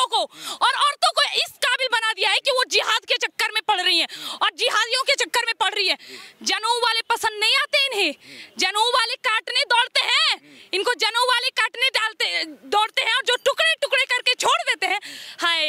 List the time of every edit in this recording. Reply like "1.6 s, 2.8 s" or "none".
none